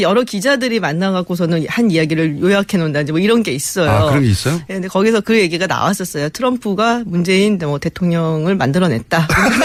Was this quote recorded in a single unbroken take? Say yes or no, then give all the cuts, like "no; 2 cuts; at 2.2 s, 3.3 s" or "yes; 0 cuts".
yes; 0 cuts